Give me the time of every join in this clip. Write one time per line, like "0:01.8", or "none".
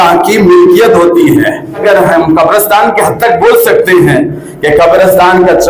0:01.8